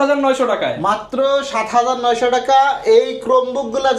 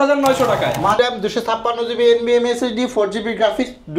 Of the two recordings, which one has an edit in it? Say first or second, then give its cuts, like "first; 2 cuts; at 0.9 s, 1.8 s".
second; 1 cut; at 1.0 s